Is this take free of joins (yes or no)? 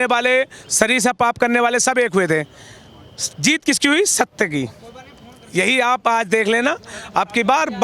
yes